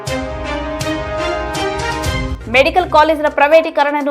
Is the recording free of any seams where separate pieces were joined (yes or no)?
no